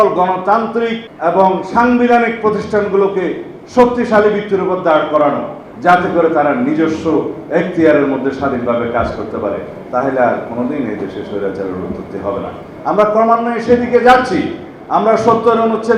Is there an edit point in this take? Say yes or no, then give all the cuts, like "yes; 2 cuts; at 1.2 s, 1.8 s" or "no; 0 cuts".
yes; 1 cut; at 1.1 s